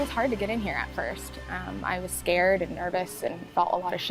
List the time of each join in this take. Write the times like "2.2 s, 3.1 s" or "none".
none